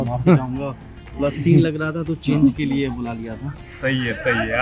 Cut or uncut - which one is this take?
uncut